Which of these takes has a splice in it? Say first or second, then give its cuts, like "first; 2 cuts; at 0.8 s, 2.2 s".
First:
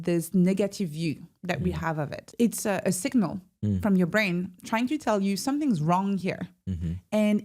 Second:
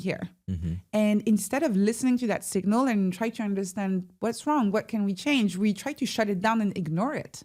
first; 1 cut; at 2.2 s